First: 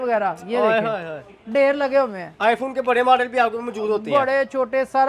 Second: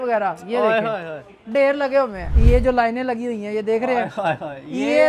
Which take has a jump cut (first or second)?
second